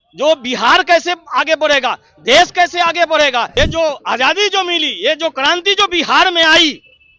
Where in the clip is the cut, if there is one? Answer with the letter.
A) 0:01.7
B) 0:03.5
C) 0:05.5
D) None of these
B